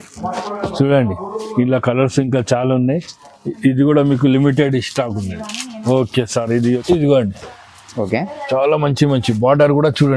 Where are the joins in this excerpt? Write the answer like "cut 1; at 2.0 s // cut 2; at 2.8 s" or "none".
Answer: cut 1; at 6.8 s